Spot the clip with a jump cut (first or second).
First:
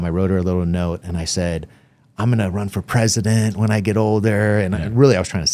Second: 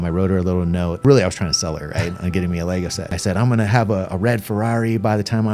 second